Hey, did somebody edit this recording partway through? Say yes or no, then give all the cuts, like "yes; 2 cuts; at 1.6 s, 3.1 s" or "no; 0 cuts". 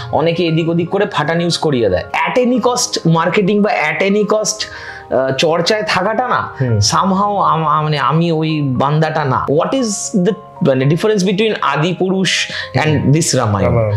yes; 2 cuts; at 2.1 s, 9.4 s